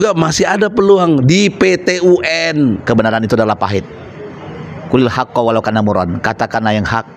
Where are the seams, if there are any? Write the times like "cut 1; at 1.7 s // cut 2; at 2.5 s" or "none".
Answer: cut 1; at 2.8 s